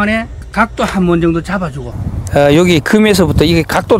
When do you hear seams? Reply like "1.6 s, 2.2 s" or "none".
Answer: 1.8 s